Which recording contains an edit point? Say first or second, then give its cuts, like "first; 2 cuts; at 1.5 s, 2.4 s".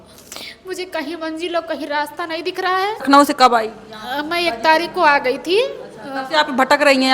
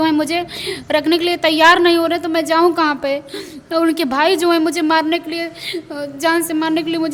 first; 1 cut; at 3.1 s